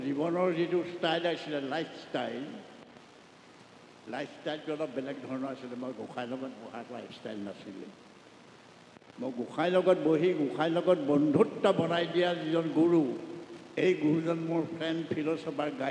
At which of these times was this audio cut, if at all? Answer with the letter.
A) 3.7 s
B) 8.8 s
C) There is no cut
C